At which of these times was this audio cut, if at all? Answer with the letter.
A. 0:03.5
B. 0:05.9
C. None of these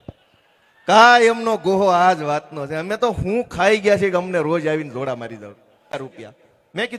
B